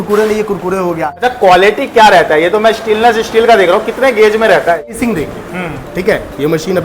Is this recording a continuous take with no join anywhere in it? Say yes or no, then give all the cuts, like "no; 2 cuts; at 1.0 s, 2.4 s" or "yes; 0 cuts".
no; 2 cuts; at 1.1 s, 5.0 s